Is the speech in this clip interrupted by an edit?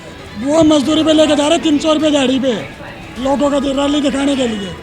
no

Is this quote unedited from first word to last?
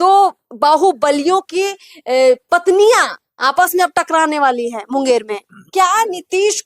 no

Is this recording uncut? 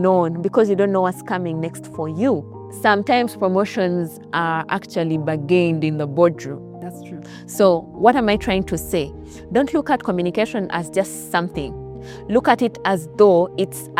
yes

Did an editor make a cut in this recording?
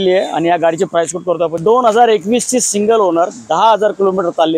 yes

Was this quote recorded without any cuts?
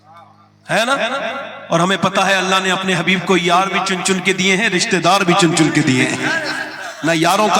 yes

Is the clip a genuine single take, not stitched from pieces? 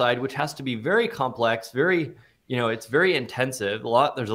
yes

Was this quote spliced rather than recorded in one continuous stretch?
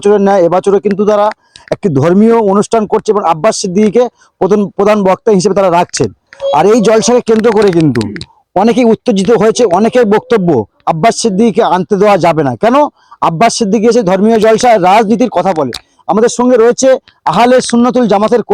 no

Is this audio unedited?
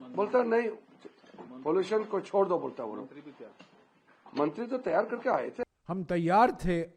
no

